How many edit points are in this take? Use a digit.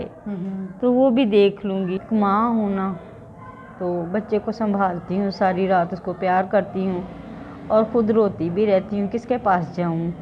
1